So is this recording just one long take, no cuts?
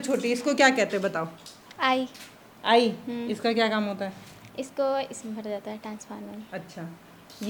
yes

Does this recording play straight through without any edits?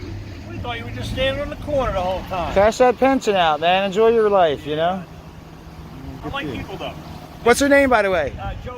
no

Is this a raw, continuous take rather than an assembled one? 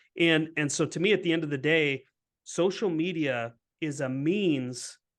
yes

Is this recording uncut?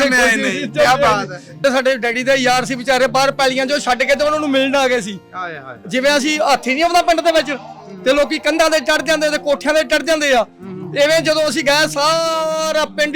no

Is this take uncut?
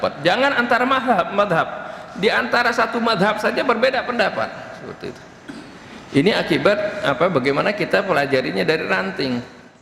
yes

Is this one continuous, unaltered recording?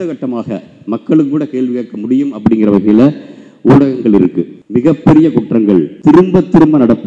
no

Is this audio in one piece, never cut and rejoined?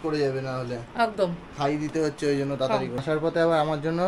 no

